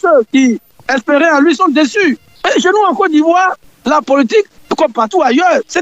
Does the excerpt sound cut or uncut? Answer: cut